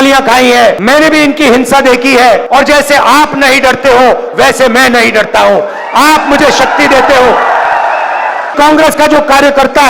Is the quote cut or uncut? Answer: cut